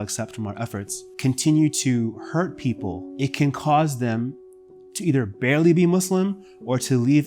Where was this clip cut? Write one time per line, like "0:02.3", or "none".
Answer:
0:01.0
0:03.0